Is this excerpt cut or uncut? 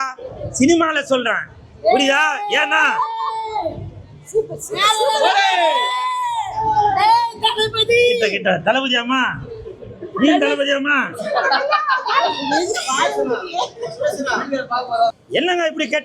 cut